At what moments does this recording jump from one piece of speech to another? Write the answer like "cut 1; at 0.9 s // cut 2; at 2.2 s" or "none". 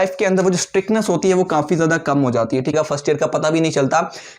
cut 1; at 2.7 s